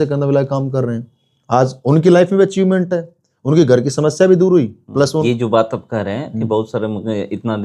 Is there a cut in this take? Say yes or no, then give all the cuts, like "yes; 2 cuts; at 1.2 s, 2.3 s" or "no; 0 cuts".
yes; 1 cut; at 5.2 s